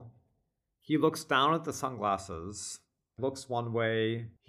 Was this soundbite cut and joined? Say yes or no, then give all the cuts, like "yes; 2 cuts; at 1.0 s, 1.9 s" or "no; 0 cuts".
yes; 1 cut; at 3.2 s